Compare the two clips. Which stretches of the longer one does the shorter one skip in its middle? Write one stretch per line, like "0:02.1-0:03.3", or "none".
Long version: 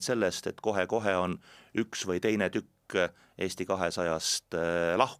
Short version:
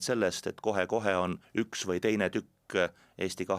0:01.4-0:01.6